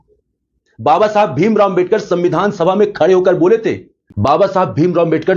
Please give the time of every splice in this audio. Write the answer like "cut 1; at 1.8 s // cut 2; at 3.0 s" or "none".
cut 1; at 4.1 s